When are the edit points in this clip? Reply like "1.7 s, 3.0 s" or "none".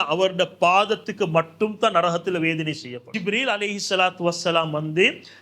2.9 s